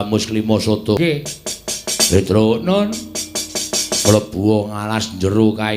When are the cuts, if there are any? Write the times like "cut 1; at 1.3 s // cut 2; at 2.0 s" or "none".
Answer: cut 1; at 1.0 s

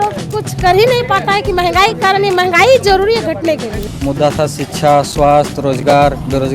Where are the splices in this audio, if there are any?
cut 1; at 3.8 s

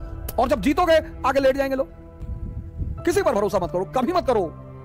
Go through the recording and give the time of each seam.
cut 1; at 2.1 s

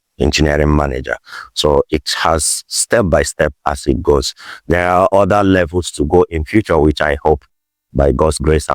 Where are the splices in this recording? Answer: none

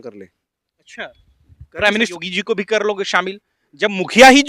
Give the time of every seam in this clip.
cut 1; at 2.1 s

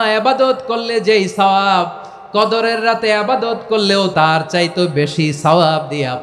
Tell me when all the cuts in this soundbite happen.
cut 1; at 4.1 s

